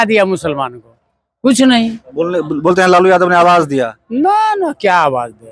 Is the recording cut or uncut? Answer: uncut